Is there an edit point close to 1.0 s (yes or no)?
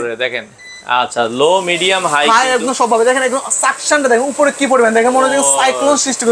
no